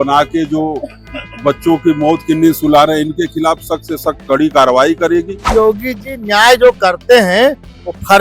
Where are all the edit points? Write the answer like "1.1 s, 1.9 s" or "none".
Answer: 5.4 s